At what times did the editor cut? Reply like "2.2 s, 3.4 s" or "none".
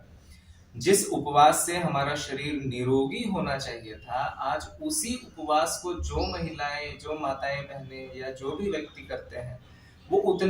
none